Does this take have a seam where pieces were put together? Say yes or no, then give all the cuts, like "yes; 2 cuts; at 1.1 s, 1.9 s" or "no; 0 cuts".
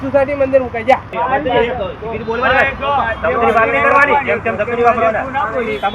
yes; 1 cut; at 1.1 s